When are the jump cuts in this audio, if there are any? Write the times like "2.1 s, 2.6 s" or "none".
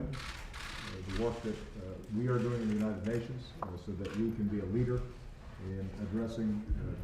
3.4 s